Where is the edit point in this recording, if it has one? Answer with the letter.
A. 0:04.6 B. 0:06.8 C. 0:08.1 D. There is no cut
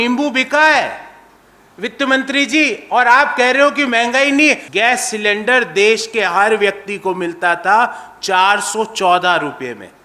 A